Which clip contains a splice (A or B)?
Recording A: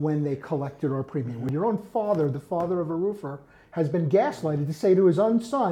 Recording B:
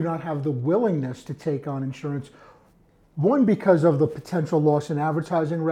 A